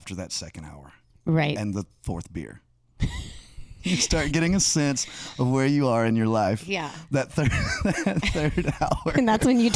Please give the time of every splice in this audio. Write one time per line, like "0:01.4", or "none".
0:03.8